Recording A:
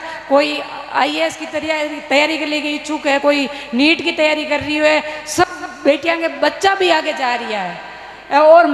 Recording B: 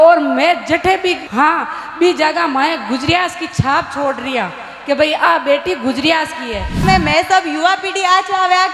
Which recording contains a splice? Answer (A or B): B